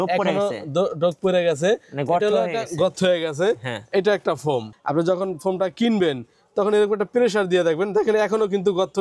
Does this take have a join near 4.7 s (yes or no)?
yes